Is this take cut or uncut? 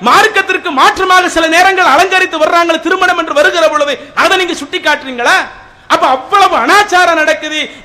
uncut